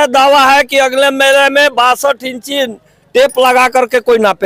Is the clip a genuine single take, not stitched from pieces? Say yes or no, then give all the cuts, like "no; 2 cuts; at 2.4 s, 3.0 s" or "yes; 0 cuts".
yes; 0 cuts